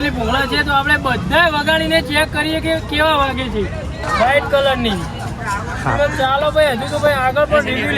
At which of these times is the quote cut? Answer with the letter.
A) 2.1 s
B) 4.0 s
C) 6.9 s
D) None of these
B